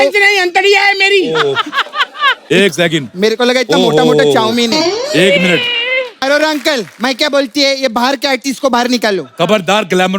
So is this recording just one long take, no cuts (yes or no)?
no